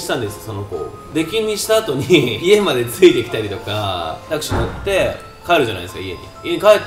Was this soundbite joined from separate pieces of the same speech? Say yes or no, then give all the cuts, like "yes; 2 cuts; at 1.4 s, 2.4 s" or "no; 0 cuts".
yes; 2 cuts; at 2.3 s, 4.2 s